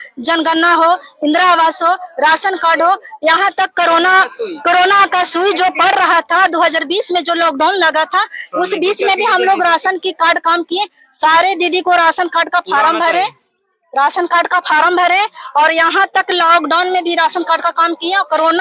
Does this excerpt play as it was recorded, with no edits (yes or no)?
yes